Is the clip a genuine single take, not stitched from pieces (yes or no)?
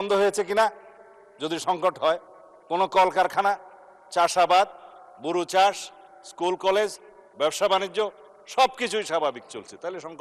yes